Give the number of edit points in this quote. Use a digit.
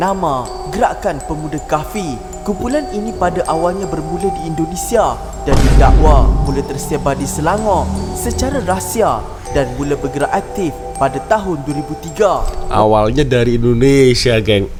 0